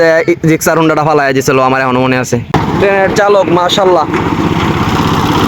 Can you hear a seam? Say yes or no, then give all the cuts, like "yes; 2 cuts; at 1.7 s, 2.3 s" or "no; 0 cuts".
yes; 1 cut; at 2.5 s